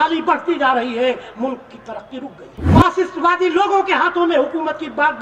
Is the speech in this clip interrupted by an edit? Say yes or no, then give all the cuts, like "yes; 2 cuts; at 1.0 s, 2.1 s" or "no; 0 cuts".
yes; 1 cut; at 2.5 s